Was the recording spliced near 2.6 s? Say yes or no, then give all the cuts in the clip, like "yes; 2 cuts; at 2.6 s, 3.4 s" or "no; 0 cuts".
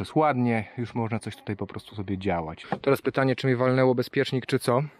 yes; 1 cut; at 2.6 s